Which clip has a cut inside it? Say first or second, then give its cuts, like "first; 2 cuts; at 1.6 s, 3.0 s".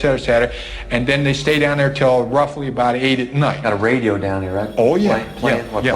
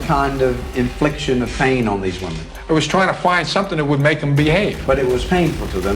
first; 1 cut; at 3.6 s